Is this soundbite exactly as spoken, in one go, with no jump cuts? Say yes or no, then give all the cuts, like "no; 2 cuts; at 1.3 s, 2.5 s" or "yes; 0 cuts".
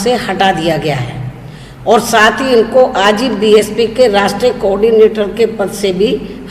yes; 0 cuts